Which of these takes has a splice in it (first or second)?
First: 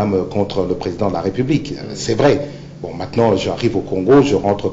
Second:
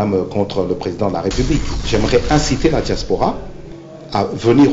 second